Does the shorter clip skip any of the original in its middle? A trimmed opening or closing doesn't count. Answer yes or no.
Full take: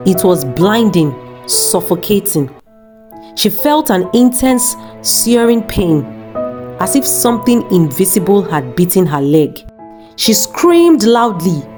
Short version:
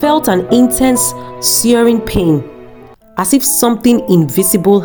no